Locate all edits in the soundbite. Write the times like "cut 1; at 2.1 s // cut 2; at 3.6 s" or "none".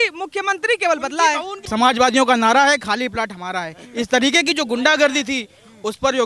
cut 1; at 1.7 s